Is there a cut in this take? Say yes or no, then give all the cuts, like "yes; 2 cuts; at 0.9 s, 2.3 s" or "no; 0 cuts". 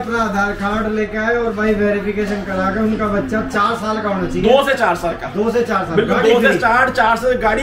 no; 0 cuts